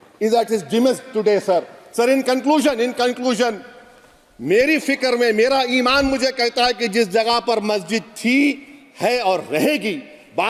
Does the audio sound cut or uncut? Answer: uncut